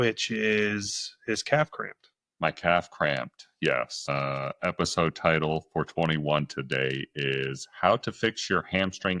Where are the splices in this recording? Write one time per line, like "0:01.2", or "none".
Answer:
0:04.1